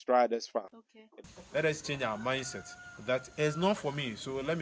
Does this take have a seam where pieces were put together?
yes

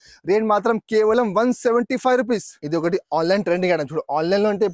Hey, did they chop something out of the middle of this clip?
yes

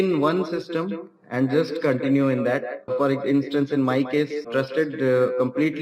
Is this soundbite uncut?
no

